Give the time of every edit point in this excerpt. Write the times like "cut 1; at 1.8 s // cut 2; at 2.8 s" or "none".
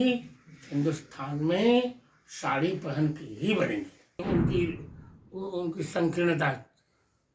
cut 1; at 4.2 s